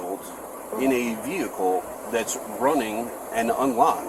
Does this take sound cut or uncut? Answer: uncut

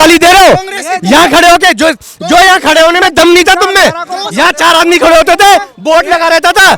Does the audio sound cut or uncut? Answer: uncut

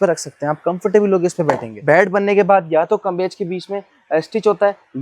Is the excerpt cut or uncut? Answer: cut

